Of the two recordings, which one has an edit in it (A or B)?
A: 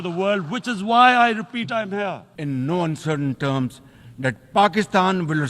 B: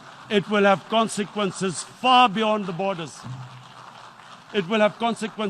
A